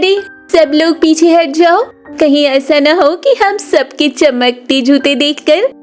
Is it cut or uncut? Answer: uncut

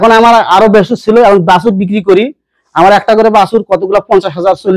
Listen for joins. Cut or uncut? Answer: uncut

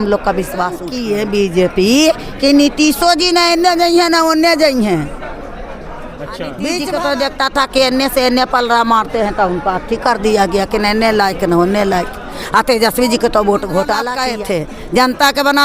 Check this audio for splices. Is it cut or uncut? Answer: cut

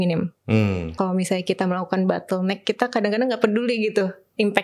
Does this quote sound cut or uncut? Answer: cut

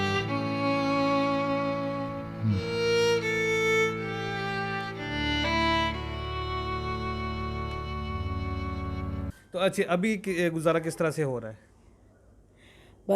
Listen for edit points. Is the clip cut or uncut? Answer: cut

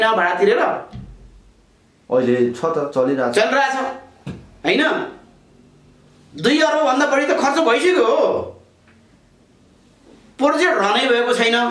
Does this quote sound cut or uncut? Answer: uncut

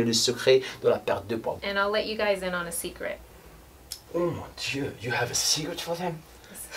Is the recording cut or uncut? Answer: cut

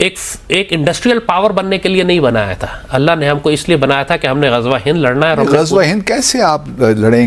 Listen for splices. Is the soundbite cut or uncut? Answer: uncut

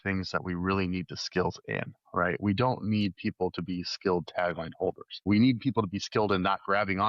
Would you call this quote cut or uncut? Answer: cut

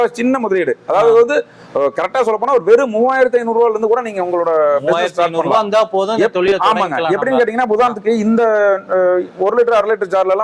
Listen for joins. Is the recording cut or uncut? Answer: uncut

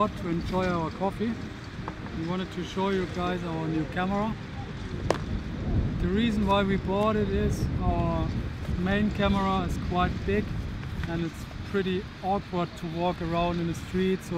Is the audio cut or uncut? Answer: cut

